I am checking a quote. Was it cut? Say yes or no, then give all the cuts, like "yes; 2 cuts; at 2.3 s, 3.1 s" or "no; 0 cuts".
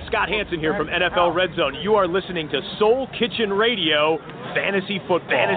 no; 0 cuts